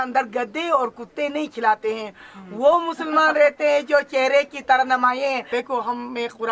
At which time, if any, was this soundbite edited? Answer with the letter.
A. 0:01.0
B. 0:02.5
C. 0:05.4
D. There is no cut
C